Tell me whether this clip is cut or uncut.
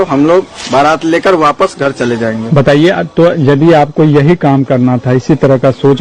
uncut